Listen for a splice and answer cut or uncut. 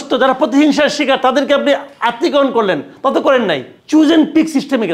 cut